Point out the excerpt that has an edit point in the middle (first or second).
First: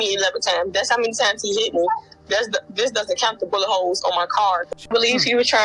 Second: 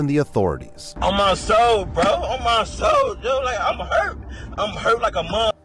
first